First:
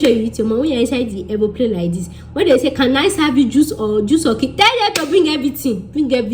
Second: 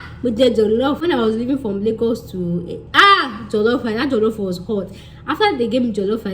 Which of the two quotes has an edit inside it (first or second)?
second